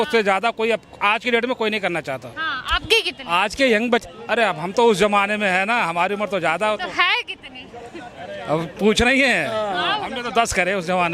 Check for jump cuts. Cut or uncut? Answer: uncut